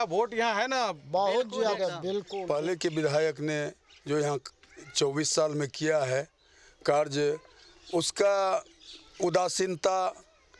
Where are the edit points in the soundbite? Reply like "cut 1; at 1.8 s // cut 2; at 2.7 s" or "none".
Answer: cut 1; at 2.3 s